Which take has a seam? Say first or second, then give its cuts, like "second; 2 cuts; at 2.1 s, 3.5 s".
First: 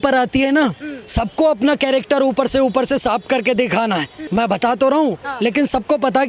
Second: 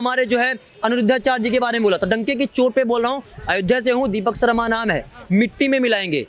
first; 1 cut; at 4.2 s